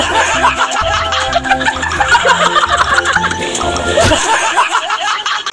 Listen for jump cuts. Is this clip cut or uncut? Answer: uncut